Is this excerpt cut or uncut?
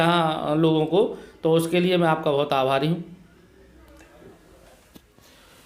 uncut